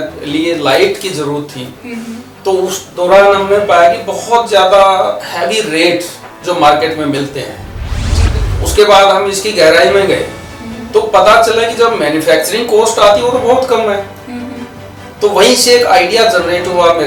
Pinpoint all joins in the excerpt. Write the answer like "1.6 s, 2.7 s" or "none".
none